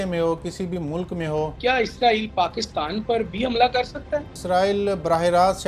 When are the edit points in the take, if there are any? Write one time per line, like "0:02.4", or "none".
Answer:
0:01.5
0:04.3